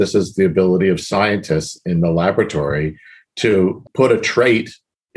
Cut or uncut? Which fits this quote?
cut